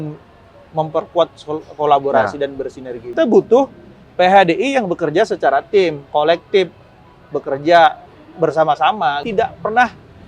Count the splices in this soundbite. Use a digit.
2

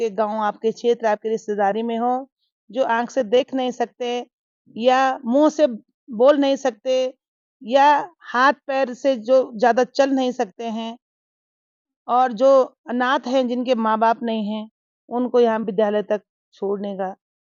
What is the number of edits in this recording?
0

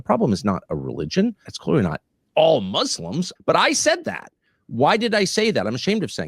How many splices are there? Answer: 2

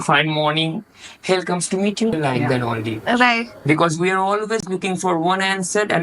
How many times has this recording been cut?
1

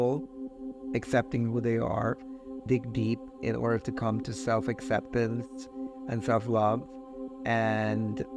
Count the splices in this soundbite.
1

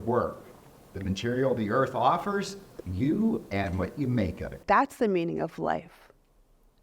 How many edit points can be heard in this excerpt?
1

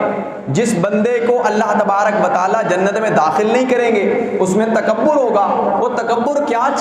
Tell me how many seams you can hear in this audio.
0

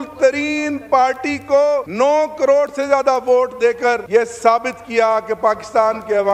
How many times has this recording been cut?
2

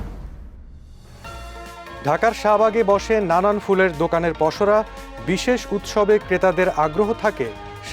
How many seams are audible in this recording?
1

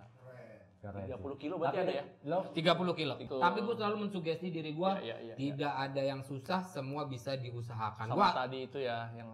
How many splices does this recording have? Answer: 1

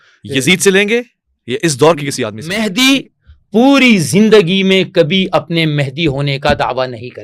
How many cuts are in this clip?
1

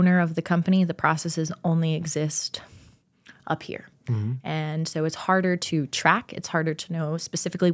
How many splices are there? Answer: 0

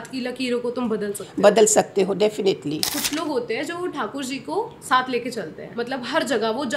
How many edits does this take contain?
2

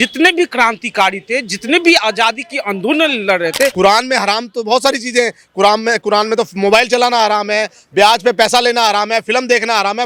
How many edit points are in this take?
1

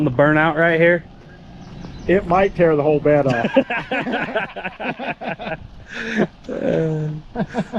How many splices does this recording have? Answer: 0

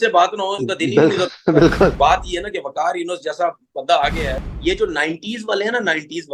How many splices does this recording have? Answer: 2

